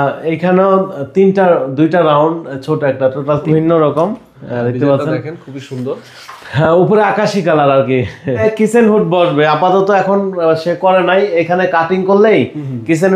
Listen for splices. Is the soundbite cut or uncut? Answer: cut